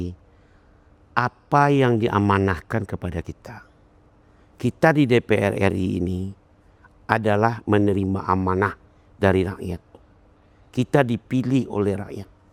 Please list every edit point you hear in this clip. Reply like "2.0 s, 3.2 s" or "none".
none